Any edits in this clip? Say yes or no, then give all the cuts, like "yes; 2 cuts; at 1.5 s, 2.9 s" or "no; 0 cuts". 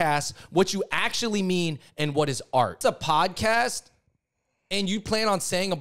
yes; 1 cut; at 2.7 s